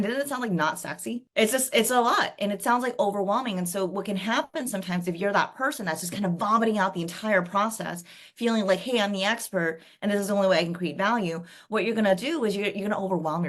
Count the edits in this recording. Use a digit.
1